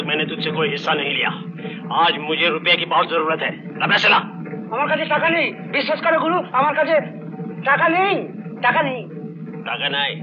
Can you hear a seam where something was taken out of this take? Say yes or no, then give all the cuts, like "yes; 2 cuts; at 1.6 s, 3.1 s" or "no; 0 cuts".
no; 0 cuts